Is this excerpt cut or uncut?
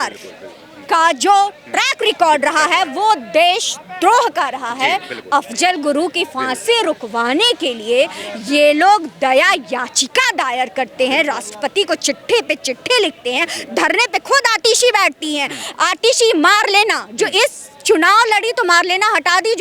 uncut